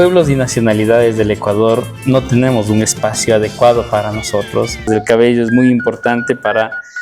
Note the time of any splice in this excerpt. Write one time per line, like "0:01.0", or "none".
0:04.9